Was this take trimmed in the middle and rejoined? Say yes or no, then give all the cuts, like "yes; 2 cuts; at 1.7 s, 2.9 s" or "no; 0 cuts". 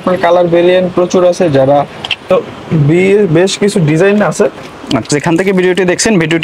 no; 0 cuts